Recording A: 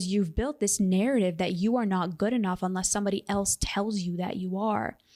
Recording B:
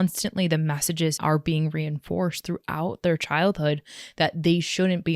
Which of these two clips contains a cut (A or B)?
B